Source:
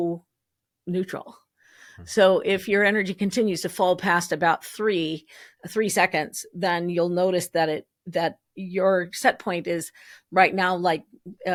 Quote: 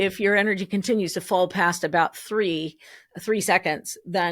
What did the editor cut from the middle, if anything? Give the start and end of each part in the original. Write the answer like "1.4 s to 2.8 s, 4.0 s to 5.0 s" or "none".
none